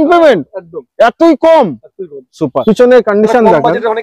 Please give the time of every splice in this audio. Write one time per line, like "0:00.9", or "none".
0:02.5

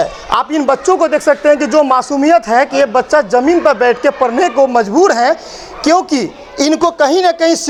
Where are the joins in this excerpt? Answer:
none

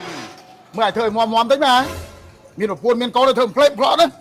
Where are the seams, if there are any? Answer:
none

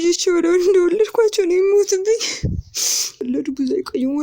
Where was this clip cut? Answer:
0:03.2

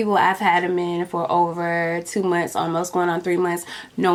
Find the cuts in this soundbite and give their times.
none

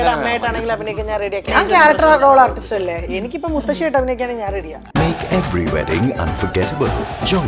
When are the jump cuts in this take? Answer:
0:01.5
0:04.8

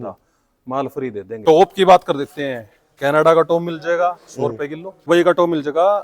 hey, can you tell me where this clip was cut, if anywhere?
0:01.3
0:05.1

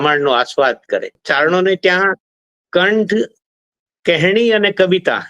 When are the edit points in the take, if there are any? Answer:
0:01.2

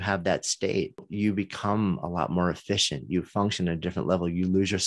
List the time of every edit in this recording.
0:01.1

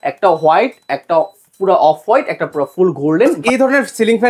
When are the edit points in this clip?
0:03.4

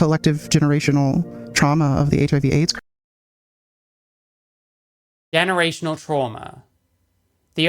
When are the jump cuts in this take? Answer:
none

